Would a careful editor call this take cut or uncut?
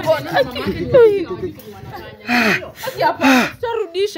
uncut